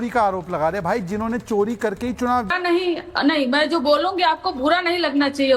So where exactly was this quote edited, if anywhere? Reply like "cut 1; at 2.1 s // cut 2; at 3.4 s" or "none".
cut 1; at 2.5 s